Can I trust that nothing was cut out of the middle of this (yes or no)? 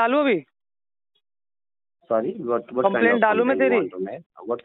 yes